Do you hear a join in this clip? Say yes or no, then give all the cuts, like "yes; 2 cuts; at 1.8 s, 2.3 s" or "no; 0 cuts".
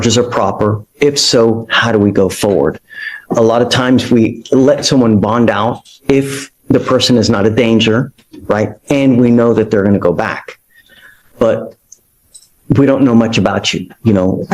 no; 0 cuts